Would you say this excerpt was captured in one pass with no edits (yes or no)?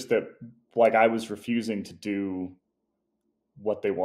yes